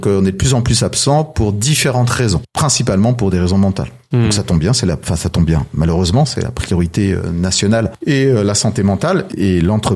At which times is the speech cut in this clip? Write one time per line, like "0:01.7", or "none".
0:02.4